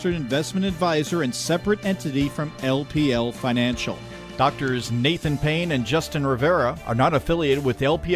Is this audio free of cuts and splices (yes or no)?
no